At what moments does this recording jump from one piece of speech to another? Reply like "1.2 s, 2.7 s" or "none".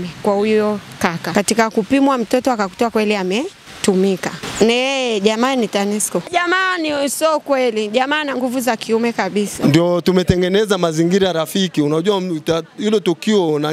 1.2 s, 3.6 s, 4.4 s, 9.5 s